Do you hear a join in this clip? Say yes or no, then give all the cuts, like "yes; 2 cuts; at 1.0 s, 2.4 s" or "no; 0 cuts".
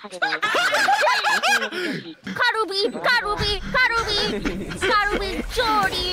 yes; 1 cut; at 2.2 s